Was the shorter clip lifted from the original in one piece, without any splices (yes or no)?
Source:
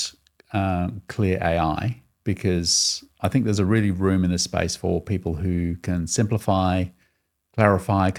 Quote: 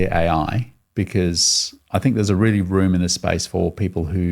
yes